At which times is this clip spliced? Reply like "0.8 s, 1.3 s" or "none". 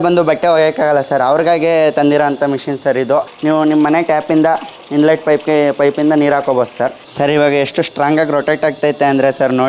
3.3 s, 7.0 s